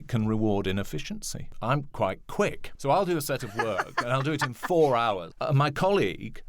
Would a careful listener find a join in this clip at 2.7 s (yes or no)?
yes